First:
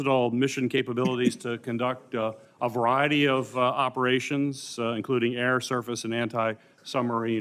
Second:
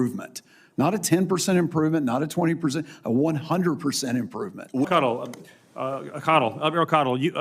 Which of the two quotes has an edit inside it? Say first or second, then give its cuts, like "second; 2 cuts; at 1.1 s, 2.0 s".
second; 1 cut; at 4.8 s